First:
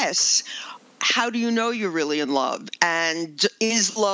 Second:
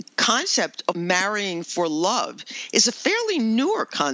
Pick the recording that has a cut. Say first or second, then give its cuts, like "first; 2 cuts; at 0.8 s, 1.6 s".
second; 1 cut; at 1.0 s